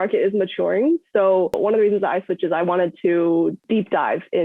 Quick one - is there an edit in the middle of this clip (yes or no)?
no